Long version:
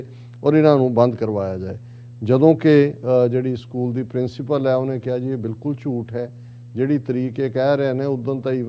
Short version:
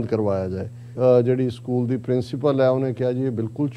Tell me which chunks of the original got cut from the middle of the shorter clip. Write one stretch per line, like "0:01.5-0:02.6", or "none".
0:02.0-0:03.0